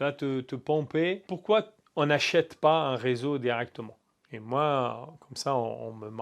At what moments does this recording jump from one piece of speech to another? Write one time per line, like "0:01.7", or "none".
none

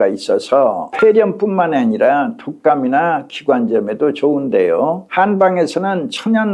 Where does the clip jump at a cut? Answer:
none

